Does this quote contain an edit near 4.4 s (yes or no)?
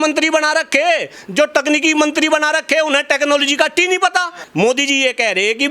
yes